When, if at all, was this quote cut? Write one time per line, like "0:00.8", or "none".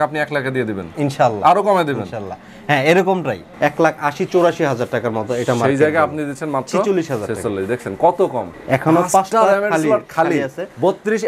0:03.4
0:08.5